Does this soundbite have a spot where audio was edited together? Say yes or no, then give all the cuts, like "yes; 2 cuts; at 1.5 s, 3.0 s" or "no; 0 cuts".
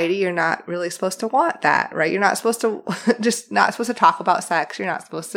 no; 0 cuts